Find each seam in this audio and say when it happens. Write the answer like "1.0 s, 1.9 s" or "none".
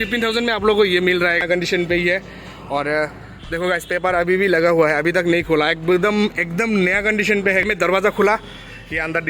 1.4 s, 7.6 s